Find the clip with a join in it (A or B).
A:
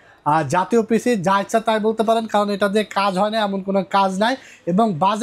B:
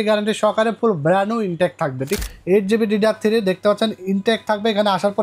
B